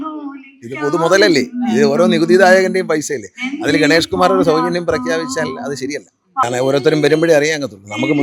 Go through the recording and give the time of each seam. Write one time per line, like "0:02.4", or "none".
0:06.4